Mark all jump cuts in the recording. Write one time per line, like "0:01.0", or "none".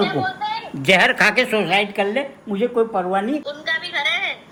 none